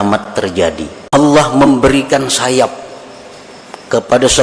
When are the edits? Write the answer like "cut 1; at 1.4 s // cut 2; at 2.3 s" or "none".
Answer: cut 1; at 0.9 s